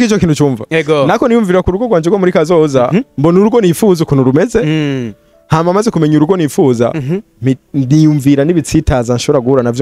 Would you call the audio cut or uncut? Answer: uncut